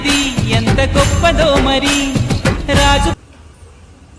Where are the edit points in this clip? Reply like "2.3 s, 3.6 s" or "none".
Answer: 3.2 s